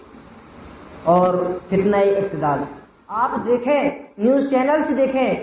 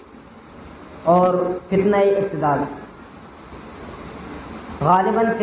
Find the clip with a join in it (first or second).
first